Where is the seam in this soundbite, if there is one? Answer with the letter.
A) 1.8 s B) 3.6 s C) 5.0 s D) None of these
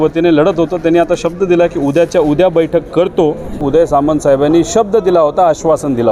B